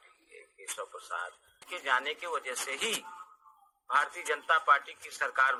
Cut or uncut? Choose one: uncut